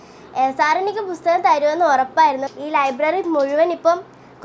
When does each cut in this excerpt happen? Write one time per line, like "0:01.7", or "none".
0:02.4